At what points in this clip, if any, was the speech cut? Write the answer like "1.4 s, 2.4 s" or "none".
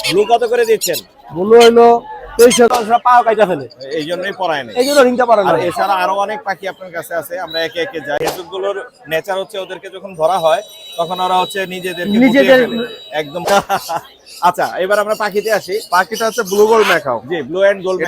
2.7 s, 8.2 s, 13.5 s